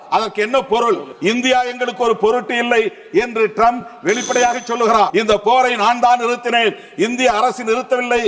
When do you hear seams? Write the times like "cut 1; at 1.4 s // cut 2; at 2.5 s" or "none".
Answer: cut 1; at 1.1 s // cut 2; at 5.1 s